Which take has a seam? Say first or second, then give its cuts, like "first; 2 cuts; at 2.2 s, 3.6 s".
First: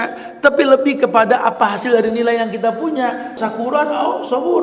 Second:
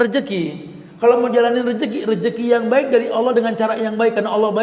first; 1 cut; at 3.4 s